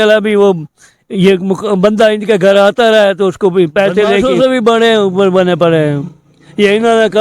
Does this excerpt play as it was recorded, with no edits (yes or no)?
no